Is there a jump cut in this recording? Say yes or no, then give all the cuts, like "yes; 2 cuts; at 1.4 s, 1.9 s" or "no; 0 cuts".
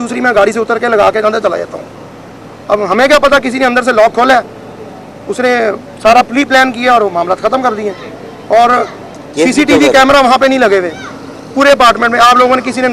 no; 0 cuts